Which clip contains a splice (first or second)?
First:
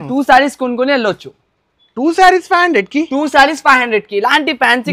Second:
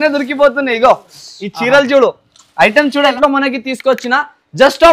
second